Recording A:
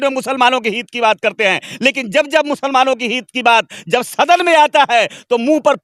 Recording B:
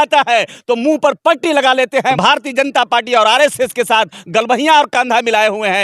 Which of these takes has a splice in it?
B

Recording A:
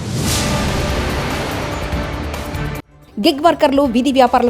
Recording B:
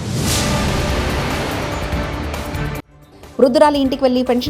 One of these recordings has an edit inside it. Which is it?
A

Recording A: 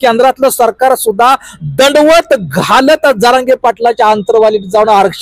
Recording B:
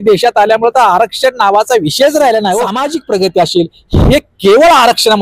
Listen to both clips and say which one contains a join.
B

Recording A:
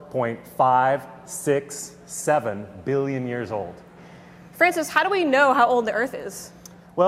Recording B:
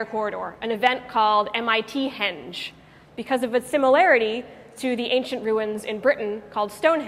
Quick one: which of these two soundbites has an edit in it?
B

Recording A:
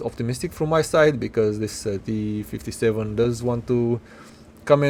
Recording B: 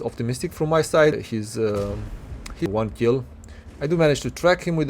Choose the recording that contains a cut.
B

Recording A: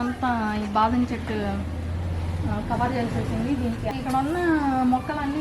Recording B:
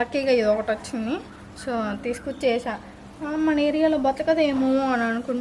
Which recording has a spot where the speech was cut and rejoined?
A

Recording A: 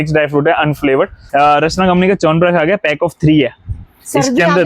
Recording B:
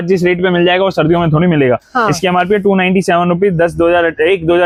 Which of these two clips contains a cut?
A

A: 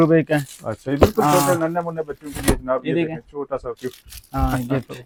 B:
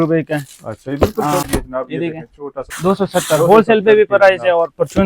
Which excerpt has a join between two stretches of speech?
B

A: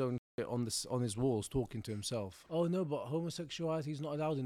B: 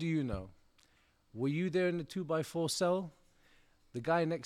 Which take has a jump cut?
A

